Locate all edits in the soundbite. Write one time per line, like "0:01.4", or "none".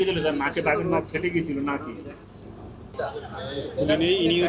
0:02.8